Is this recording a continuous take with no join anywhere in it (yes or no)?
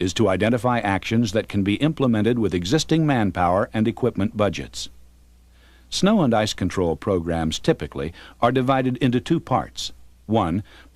yes